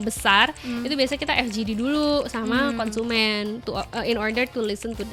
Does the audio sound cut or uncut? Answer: uncut